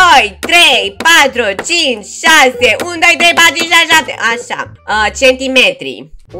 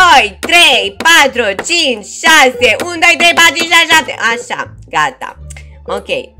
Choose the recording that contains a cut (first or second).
first